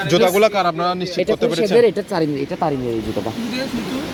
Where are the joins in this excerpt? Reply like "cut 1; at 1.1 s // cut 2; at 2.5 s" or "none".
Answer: none

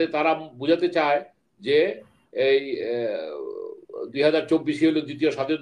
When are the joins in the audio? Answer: none

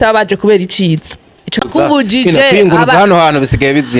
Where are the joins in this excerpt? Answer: cut 1; at 1.6 s

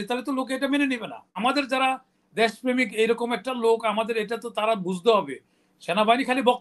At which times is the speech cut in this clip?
cut 1; at 1.4 s

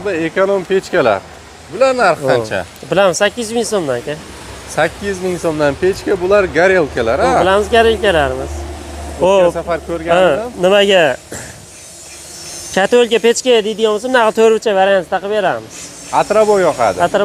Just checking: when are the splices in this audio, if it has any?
none

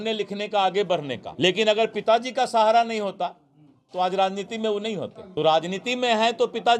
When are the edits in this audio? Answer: cut 1; at 1.2 s // cut 2; at 5.2 s

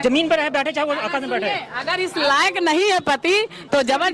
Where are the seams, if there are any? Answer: none

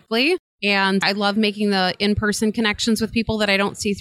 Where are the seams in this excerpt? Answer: none

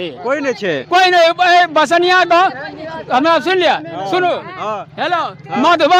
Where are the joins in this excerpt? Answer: none

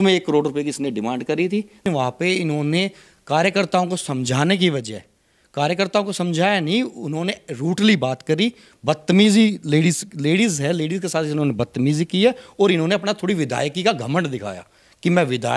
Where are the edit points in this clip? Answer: cut 1; at 1.9 s

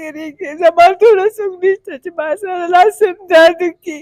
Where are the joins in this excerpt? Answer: none

